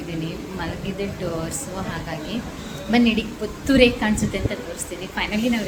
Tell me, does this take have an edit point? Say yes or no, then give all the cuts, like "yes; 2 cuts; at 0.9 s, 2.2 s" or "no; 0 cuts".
no; 0 cuts